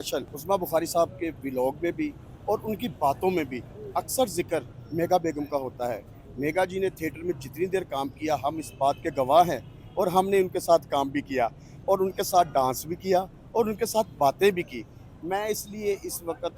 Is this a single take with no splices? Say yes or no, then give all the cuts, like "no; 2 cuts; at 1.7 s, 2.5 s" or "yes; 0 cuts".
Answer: yes; 0 cuts